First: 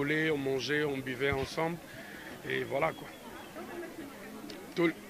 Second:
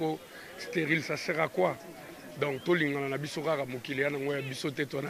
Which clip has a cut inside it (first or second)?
first